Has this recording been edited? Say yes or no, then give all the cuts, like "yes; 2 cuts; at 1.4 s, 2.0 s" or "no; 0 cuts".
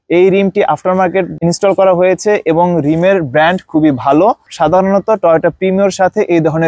no; 0 cuts